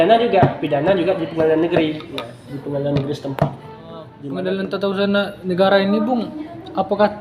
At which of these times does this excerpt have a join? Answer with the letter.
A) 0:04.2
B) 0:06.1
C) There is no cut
A